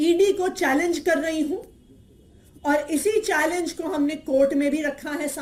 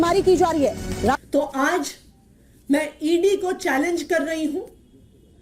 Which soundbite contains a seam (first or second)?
second